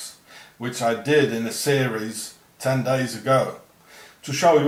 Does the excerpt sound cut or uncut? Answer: uncut